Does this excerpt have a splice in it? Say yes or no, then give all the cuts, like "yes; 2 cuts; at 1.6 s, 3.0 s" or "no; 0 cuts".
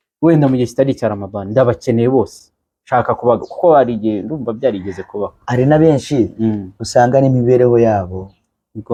no; 0 cuts